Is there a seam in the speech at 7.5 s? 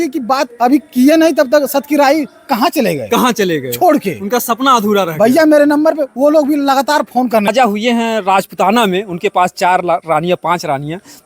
yes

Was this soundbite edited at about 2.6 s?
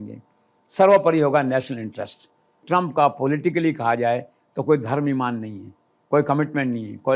yes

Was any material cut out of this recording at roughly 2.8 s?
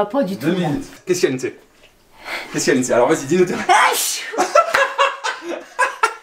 no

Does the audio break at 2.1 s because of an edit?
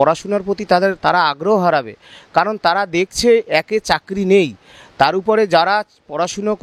no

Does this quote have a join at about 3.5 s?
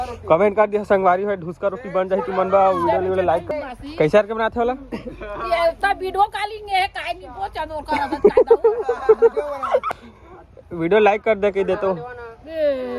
yes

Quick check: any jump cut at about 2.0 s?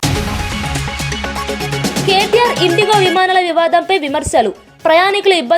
yes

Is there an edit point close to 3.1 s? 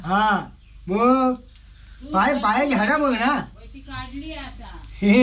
no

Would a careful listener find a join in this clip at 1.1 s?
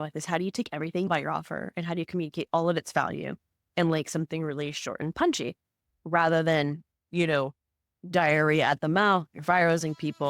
yes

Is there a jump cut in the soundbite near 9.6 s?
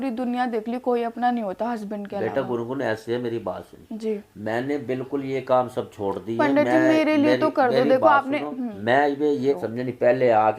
yes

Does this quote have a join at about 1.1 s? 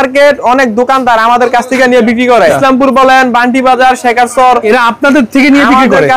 no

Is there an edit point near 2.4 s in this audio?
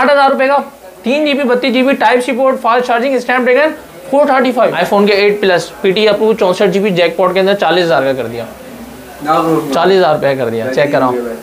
no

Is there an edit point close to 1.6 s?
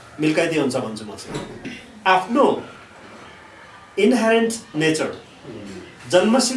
yes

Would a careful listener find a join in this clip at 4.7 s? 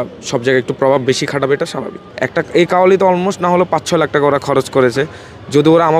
no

